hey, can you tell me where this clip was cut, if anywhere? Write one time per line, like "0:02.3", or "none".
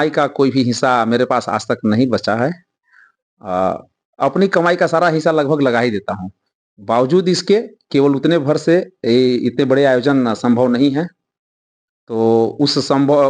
none